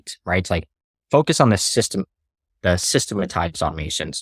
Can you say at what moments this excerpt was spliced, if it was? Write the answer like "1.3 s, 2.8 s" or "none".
none